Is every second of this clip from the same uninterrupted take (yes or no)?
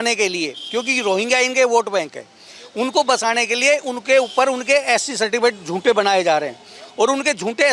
yes